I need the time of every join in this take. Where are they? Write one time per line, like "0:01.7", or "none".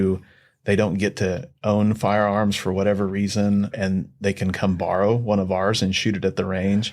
0:03.7